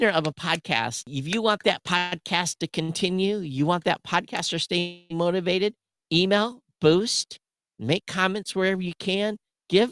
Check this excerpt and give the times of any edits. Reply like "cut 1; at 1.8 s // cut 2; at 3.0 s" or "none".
cut 1; at 1.1 s